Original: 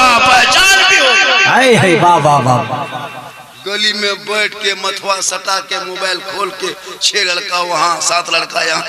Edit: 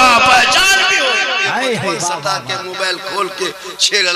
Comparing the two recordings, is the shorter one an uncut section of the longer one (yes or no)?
no